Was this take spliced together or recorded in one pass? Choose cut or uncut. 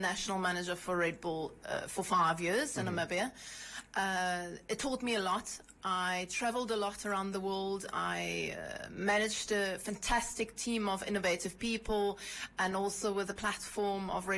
uncut